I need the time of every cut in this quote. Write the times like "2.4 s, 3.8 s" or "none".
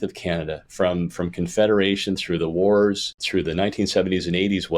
3.1 s